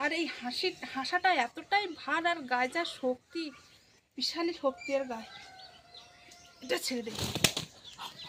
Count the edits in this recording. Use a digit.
0